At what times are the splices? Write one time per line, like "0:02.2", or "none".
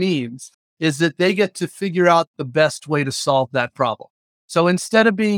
none